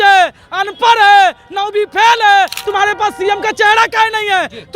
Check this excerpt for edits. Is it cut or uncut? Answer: cut